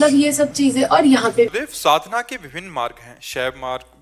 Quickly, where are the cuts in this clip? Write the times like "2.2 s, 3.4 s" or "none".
1.5 s